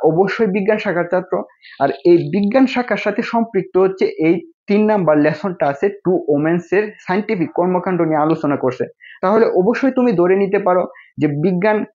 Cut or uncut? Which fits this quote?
uncut